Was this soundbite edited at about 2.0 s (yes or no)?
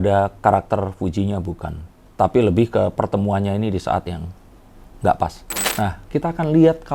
no